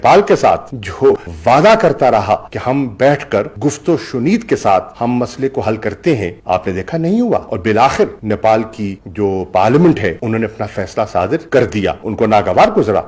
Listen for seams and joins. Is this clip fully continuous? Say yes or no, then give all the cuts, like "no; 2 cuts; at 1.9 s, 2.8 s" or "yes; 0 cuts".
no; 1 cut; at 1.3 s